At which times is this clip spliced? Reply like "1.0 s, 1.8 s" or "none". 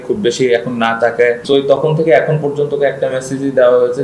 1.4 s